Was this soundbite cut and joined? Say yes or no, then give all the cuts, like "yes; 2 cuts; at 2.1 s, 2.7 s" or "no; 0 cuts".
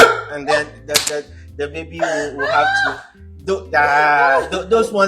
no; 0 cuts